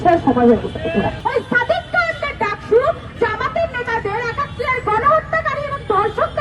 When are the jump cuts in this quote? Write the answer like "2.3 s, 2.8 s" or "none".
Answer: 1.2 s, 3.1 s